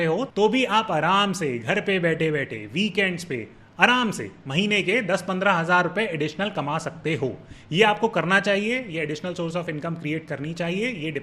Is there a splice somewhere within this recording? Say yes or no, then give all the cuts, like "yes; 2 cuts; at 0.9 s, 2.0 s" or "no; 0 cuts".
no; 0 cuts